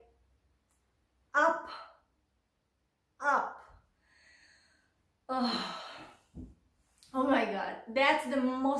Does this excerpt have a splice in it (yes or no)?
no